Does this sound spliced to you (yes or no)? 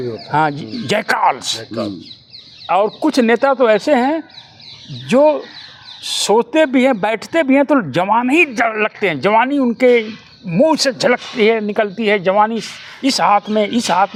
no